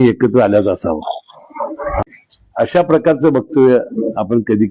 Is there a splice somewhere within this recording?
yes; 1 cut; at 1.9 s

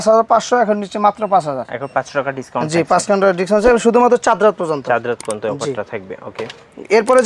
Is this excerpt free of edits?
yes; 0 cuts

